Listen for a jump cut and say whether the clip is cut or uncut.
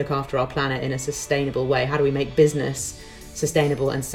uncut